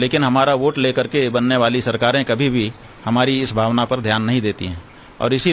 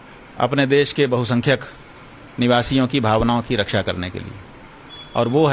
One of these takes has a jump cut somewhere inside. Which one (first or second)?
second